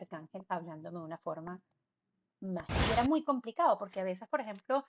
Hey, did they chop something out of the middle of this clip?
yes; 1 cut; at 2.9 s

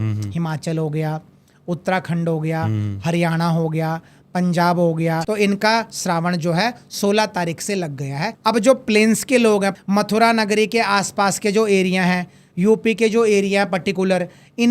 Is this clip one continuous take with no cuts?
no; 3 cuts; at 5.2 s, 8.3 s, 9.8 s

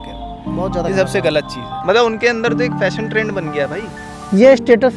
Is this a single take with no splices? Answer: no; 1 cut; at 1.6 s

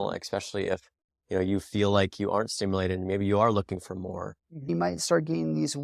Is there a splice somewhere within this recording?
yes; 1 cut; at 4.7 s

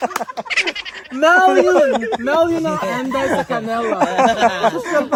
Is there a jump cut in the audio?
no; 0 cuts

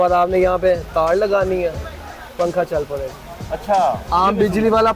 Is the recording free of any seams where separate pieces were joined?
no; 1 cut; at 3.1 s

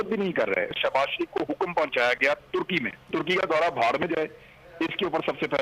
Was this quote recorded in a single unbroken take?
no; 2 cuts; at 0.8 s, 3.1 s

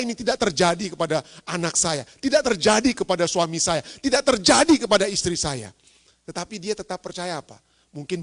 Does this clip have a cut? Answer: no; 0 cuts

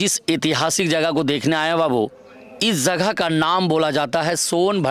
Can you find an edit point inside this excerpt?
no; 0 cuts

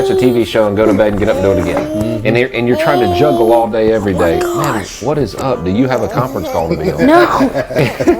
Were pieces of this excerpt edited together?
no; 0 cuts

